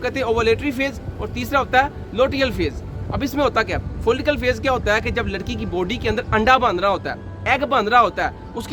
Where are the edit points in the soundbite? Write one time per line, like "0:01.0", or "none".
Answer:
none